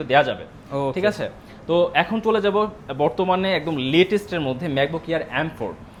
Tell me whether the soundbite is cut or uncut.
uncut